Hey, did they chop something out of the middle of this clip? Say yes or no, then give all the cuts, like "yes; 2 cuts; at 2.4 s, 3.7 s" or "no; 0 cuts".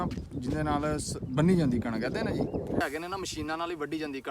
yes; 1 cut; at 2.8 s